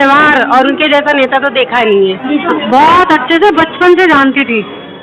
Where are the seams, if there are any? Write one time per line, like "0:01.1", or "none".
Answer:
0:02.2